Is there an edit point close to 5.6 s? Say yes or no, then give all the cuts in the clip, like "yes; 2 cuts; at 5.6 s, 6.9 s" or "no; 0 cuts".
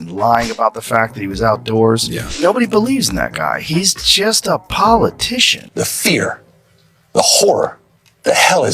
yes; 1 cut; at 5.6 s